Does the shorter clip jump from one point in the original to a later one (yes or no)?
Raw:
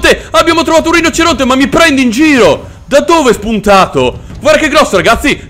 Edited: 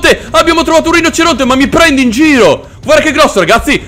yes